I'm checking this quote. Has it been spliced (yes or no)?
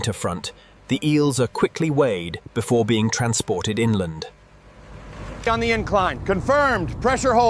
yes